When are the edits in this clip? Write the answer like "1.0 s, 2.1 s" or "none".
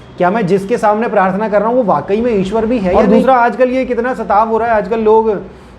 2.9 s